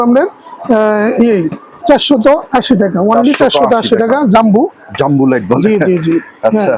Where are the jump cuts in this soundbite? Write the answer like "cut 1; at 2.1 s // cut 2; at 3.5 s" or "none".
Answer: none